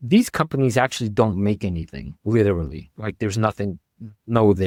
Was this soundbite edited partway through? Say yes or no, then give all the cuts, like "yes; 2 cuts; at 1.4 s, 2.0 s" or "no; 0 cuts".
no; 0 cuts